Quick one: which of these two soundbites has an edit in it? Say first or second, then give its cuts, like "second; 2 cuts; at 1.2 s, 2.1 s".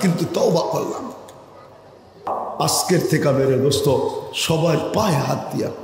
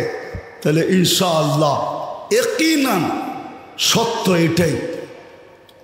first; 1 cut; at 2.4 s